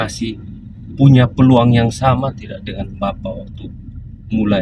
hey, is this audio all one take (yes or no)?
yes